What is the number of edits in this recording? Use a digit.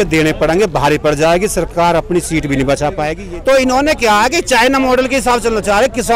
1